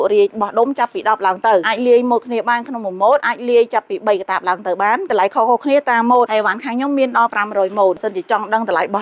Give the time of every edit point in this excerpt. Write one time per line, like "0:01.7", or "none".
none